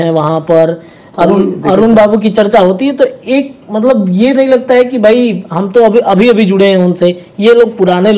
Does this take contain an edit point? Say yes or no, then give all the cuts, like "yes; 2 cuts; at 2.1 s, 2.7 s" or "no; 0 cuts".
no; 0 cuts